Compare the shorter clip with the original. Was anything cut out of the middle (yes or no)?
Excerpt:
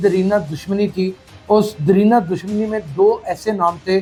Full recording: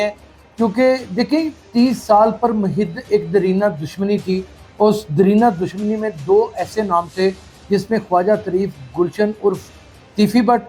no